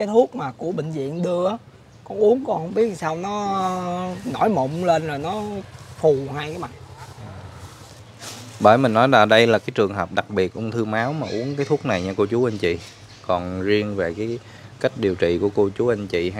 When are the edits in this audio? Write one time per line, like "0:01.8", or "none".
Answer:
0:07.9